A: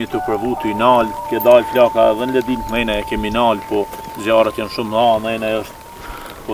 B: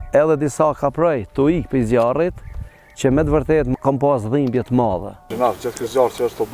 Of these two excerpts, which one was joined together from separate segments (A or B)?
B